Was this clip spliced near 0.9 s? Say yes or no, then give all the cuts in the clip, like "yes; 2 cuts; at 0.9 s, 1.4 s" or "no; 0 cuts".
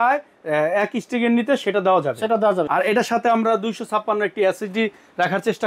no; 1 cut; at 2.7 s